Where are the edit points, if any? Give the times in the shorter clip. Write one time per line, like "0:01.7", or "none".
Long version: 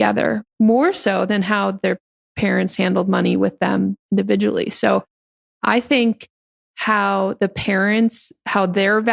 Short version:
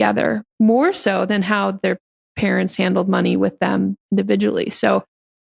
none